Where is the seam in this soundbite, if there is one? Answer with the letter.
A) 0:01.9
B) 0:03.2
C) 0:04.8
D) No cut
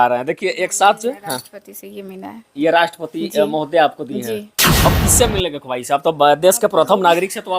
C